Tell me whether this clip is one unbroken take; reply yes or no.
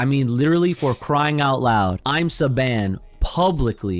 no